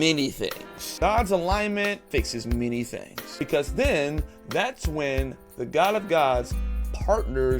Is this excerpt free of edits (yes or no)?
no